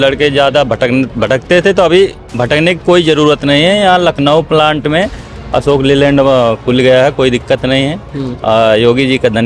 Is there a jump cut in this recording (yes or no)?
no